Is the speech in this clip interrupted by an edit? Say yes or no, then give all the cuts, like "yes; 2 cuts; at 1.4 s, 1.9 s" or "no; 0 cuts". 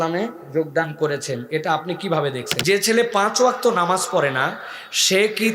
yes; 1 cut; at 2.5 s